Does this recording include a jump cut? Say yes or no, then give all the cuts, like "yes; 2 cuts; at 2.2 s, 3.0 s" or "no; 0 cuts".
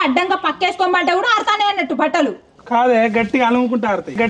no; 0 cuts